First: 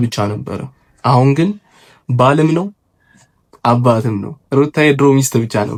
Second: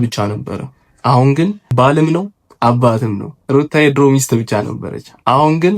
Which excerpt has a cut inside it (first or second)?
second